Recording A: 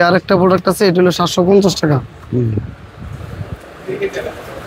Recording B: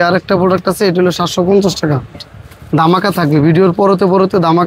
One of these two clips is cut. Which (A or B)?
B